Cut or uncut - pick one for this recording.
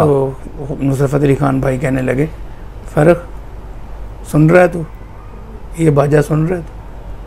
uncut